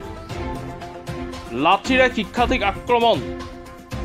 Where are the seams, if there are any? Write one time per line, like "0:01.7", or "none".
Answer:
0:01.4
0:03.2